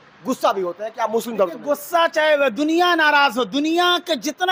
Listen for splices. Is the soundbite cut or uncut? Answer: uncut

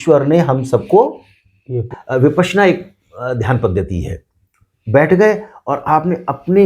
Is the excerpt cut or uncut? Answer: cut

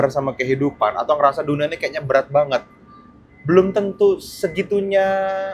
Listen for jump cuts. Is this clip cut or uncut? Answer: uncut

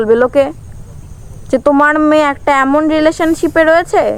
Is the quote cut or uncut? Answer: uncut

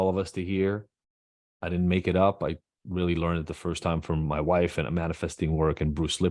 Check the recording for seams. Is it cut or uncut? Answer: uncut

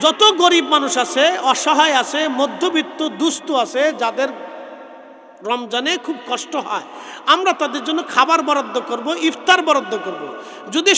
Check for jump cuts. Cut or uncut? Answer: uncut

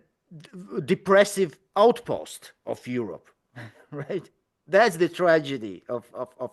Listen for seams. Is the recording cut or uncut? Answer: uncut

